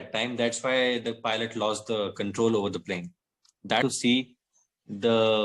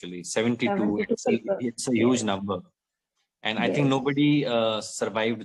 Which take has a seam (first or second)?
first